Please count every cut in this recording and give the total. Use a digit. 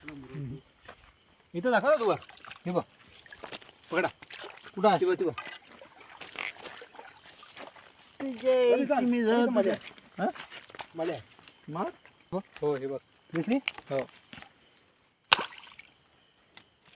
1